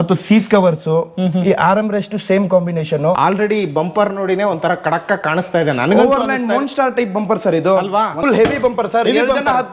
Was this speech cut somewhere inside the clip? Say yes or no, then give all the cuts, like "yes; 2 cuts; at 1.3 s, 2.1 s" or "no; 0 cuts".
yes; 2 cuts; at 3.2 s, 8.2 s